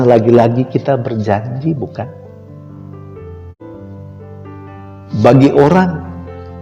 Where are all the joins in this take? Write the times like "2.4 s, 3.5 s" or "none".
3.6 s